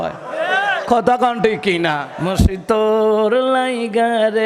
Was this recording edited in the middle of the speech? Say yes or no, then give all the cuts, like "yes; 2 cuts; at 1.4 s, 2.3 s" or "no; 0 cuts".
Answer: yes; 1 cut; at 2.1 s